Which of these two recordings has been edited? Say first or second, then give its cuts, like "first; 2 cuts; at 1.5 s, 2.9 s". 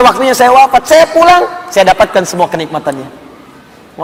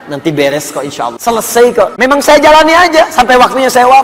second; 2 cuts; at 1.2 s, 1.9 s